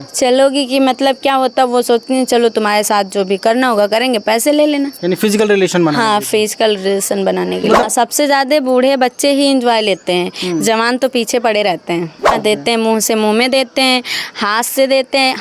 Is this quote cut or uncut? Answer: cut